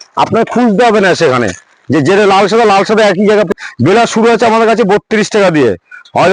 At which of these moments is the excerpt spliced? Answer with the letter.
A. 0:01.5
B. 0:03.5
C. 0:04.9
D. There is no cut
B